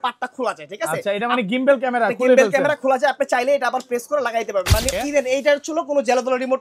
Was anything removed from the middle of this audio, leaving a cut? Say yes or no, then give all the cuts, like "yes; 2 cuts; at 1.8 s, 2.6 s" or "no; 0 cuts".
yes; 1 cut; at 4.9 s